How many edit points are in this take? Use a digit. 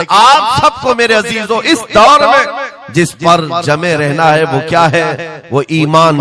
0